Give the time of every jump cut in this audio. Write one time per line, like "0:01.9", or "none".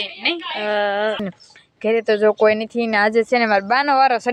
0:01.4

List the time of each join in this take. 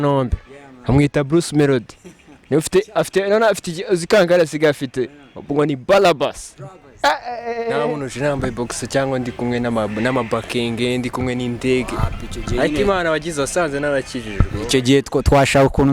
0:07.9

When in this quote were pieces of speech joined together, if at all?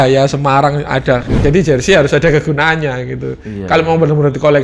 0:01.4

